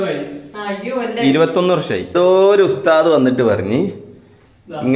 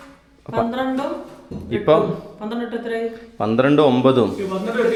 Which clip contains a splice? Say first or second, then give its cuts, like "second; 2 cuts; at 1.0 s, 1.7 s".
first; 1 cut; at 2.1 s